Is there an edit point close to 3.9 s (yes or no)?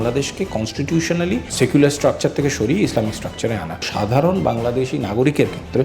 yes